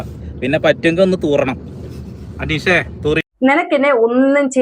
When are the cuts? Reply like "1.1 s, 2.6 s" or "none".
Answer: 3.2 s